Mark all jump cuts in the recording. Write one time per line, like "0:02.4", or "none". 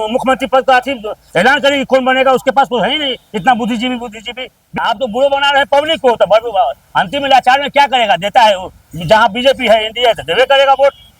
0:04.8